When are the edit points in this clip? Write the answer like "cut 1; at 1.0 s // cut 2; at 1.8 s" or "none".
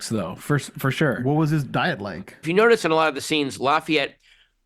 cut 1; at 2.4 s